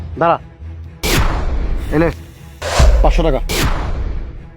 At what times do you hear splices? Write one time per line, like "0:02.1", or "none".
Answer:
0:00.9
0:01.5